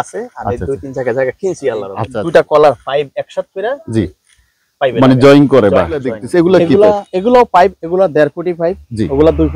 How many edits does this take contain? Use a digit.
2